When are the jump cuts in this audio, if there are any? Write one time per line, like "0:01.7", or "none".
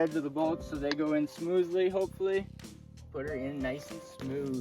0:02.8